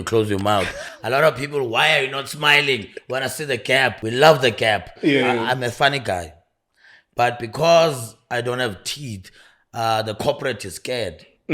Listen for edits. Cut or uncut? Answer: cut